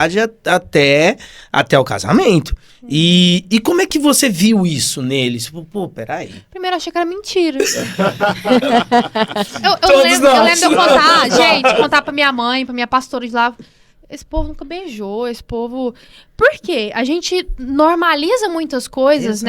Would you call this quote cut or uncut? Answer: uncut